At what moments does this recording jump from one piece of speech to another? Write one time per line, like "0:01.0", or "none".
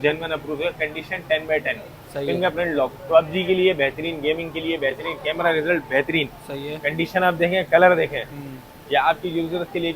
none